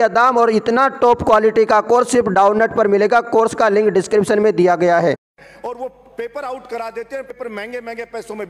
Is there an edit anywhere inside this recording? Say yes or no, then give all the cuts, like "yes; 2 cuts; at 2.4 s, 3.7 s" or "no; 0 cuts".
yes; 2 cuts; at 5.3 s, 7.3 s